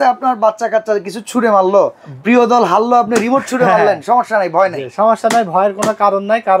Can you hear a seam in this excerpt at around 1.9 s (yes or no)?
no